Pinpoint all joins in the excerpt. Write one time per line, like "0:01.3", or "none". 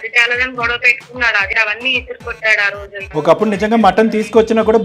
0:01.5
0:03.1